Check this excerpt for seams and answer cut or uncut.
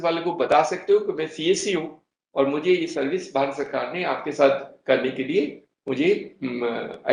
uncut